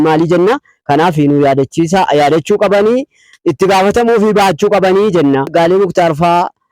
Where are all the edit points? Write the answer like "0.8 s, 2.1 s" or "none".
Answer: 5.5 s